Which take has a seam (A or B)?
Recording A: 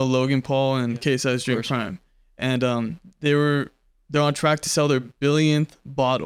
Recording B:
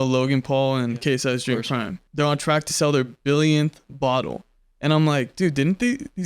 B